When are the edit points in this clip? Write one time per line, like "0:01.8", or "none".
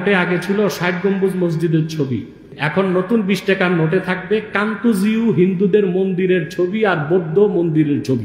0:02.5

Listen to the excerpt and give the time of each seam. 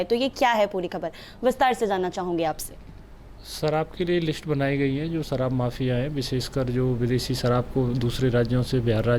none

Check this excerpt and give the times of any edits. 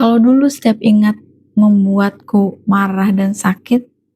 none

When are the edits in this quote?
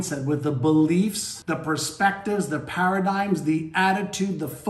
0:01.3

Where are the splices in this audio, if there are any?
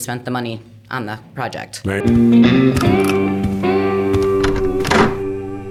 none

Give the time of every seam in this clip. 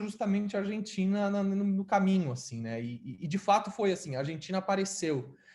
none

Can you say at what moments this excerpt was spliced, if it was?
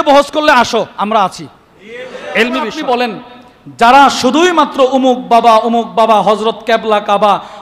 0:02.8

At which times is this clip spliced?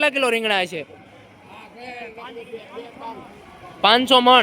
none

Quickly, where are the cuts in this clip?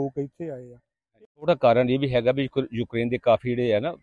0:01.2

